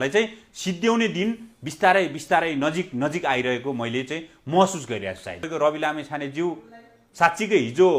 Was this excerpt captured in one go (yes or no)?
no